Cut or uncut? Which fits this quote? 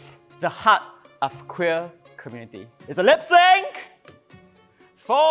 uncut